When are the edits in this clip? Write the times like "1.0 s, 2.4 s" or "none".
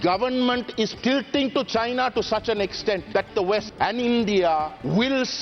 0.9 s, 3.3 s